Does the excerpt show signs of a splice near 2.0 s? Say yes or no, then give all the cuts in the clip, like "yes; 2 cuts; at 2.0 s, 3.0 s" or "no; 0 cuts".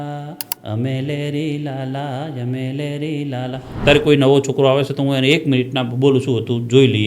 no; 1 cut; at 3.8 s